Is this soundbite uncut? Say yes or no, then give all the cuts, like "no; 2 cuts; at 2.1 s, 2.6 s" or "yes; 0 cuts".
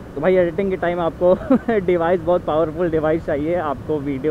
yes; 0 cuts